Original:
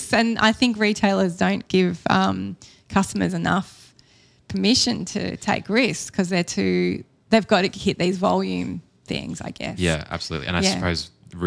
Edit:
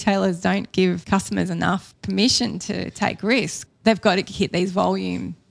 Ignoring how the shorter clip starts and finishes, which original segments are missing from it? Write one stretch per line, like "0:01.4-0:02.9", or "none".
0:02.0-0:02.8
0:03.8-0:04.4
0:06.0-0:07.0